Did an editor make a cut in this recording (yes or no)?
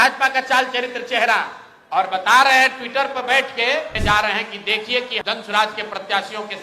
yes